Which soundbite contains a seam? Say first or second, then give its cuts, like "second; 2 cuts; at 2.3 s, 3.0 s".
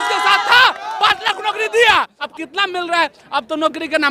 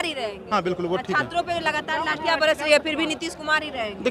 first; 1 cut; at 2.2 s